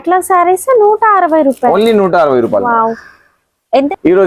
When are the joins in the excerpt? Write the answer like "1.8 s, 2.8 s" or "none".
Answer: 3.4 s